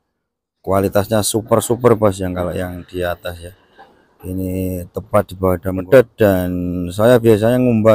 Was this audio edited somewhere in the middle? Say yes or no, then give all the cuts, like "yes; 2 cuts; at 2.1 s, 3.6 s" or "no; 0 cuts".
yes; 1 cut; at 5.9 s